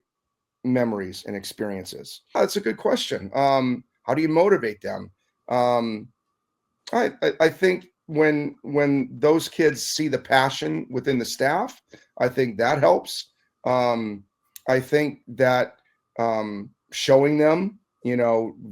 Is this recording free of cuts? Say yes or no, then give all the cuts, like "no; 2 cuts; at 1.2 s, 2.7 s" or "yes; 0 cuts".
no; 1 cut; at 2.3 s